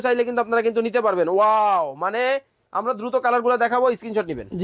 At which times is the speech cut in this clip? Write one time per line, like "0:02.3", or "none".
none